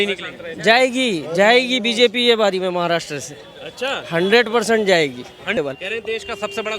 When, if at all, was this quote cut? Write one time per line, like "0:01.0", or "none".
0:05.6